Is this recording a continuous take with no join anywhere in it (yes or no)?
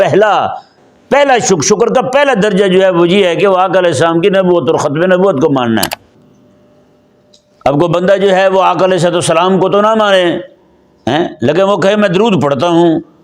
no